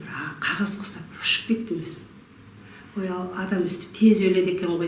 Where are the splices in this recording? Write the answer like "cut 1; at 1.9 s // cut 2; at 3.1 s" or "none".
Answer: none